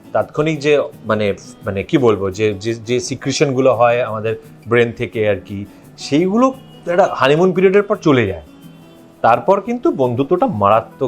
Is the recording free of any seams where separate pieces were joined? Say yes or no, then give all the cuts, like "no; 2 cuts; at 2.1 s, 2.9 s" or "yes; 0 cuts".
yes; 0 cuts